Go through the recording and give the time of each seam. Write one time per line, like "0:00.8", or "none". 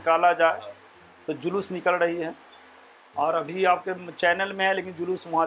none